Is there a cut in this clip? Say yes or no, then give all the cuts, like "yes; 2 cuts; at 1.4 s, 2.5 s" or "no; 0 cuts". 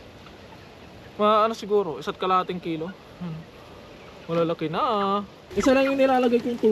yes; 1 cut; at 5.4 s